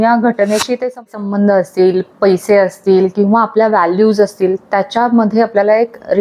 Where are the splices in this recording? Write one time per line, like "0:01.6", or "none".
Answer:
0:01.0